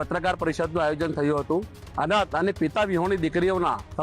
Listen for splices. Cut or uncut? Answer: cut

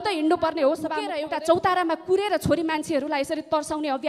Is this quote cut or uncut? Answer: cut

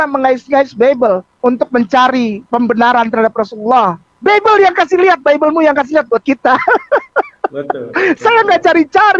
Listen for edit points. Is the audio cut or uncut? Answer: cut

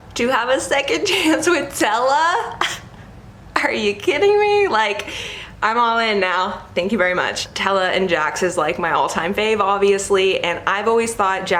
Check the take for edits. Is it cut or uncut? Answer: uncut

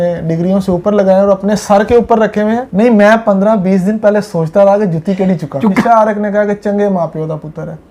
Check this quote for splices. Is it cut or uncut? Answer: cut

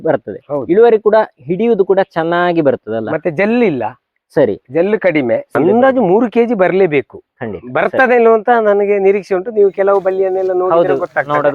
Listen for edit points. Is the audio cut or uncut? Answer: cut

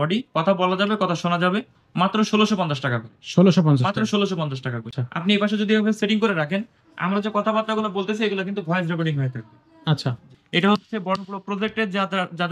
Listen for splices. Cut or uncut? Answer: cut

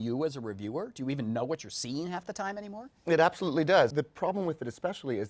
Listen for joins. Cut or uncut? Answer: cut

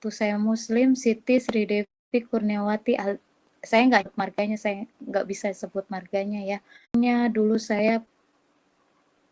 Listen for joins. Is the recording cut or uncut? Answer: cut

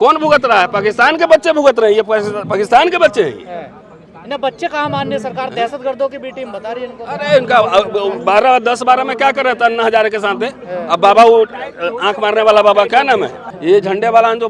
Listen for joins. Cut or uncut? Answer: cut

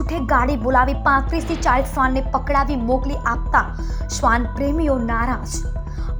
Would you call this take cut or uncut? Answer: uncut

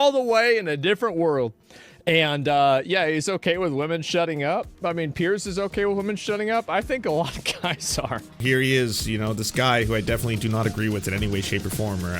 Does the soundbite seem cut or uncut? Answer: cut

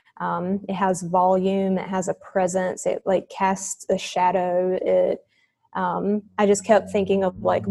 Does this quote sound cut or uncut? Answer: uncut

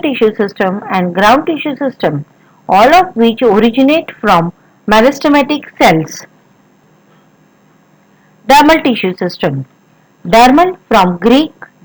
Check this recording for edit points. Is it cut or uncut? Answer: cut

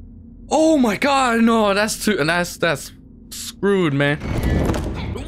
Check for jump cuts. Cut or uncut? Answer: uncut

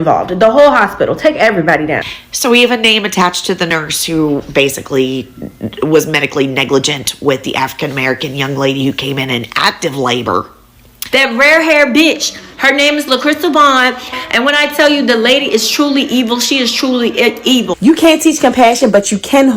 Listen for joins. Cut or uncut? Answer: cut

